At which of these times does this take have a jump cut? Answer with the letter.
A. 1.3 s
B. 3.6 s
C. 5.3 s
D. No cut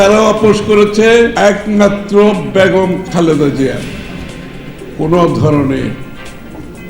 A